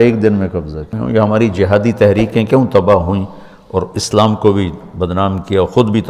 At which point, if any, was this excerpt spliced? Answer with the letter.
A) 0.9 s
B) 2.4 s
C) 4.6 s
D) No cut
A